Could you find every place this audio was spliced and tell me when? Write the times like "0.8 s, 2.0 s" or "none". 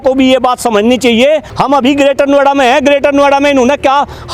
1.5 s